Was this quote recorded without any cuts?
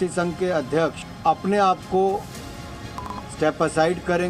no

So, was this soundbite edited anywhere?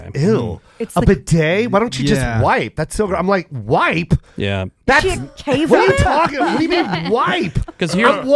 no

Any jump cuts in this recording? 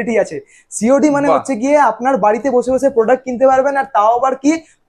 no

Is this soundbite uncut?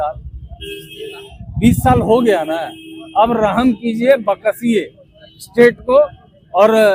yes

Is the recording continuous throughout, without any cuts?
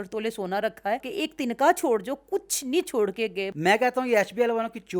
no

